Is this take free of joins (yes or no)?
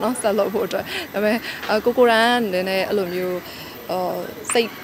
yes